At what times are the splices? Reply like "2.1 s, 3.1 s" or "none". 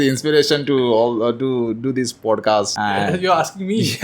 2.7 s